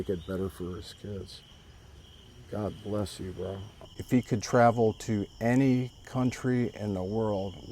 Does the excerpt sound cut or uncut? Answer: cut